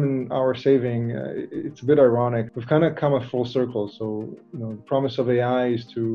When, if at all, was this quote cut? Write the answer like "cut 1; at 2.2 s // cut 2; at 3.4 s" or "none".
cut 1; at 2.5 s